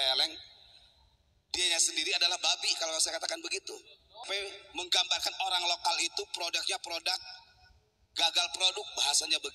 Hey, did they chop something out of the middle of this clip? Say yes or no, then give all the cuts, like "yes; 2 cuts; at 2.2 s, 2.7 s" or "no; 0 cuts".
yes; 1 cut; at 4.2 s